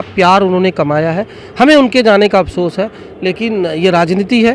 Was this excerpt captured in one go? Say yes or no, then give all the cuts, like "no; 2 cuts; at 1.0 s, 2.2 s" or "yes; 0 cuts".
yes; 0 cuts